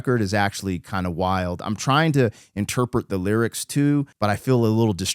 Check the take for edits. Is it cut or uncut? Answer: cut